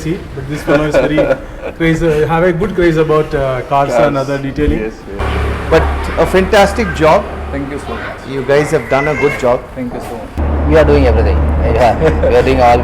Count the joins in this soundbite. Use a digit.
2